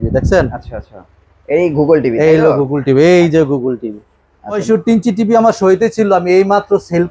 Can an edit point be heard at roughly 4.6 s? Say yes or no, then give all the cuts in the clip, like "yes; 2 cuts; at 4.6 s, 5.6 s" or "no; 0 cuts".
yes; 1 cut; at 4.6 s